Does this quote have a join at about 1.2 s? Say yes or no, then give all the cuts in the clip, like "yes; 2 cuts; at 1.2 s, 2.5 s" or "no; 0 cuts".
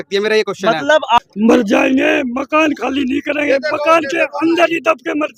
yes; 1 cut; at 1.2 s